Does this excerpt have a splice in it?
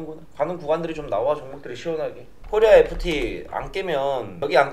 yes; 1 cut; at 2.4 s

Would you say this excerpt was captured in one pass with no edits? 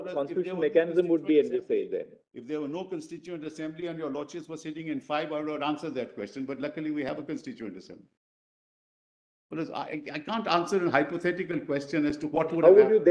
yes; 0 cuts

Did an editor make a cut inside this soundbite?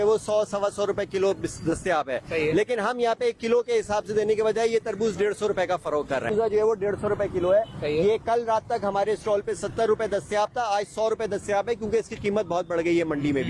yes; 1 cut; at 6.3 s

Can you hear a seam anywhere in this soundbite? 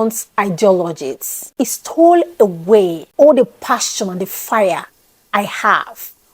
yes; 2 cuts; at 1.4 s, 3.0 s

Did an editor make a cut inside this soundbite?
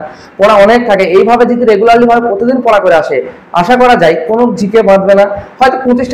no; 0 cuts

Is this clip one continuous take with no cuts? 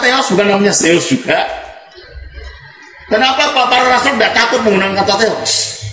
yes; 0 cuts

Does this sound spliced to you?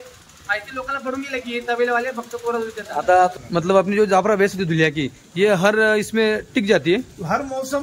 yes; 1 cut; at 3.4 s

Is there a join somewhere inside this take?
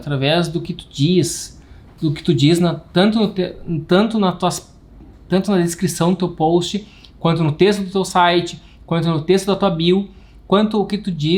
no; 0 cuts

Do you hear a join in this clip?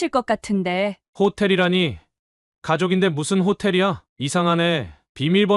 yes; 1 cut; at 4.1 s

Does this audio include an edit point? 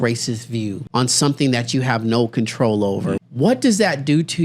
yes; 2 cuts; at 0.8 s, 3.2 s

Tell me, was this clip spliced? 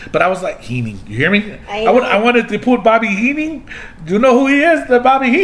no; 0 cuts

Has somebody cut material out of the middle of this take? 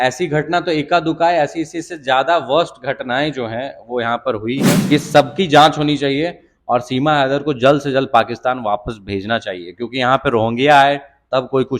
yes; 1 cut; at 4.9 s

